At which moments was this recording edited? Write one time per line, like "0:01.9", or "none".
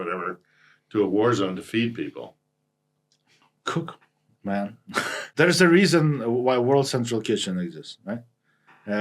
0:05.3